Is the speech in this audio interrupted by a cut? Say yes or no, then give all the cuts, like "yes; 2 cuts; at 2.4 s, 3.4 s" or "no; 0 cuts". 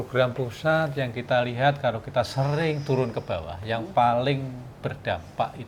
no; 0 cuts